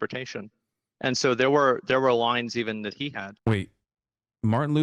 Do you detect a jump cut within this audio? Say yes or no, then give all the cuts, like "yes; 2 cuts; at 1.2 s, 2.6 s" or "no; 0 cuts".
yes; 1 cut; at 3.3 s